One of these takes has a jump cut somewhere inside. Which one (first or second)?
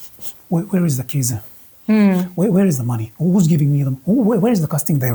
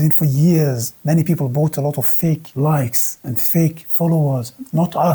second